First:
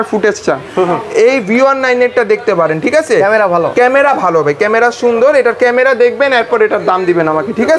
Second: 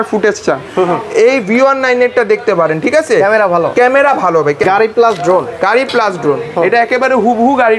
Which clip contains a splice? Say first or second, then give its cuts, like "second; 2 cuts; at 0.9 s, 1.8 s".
second; 1 cut; at 4.6 s